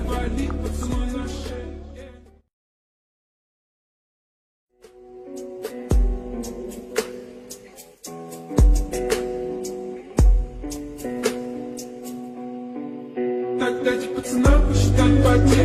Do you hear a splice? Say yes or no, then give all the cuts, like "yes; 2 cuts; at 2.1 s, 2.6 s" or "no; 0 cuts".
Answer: no; 0 cuts